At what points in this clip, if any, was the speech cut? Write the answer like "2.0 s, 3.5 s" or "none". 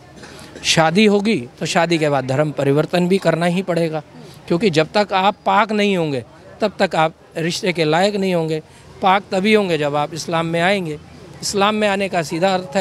none